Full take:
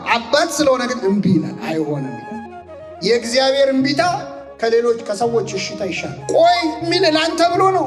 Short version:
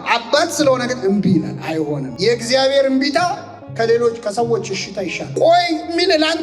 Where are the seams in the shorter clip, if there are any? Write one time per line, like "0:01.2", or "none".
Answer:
0:02.1
0:05.2